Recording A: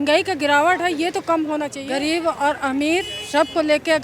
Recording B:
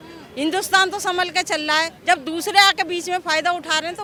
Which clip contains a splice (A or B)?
A